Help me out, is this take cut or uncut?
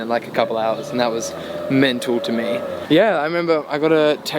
cut